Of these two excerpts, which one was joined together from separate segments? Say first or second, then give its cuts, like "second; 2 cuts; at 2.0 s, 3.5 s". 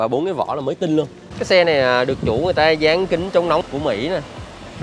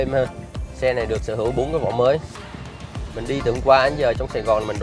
first; 2 cuts; at 1.3 s, 3.6 s